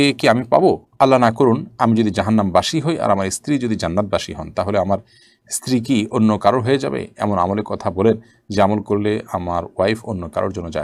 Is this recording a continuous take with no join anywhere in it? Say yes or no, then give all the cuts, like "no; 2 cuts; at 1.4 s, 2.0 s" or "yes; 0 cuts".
yes; 0 cuts